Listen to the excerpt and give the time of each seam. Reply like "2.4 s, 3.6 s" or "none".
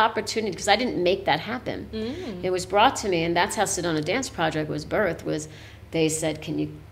none